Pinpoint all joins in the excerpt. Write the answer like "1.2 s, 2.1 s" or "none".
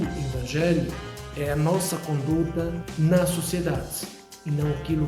2.8 s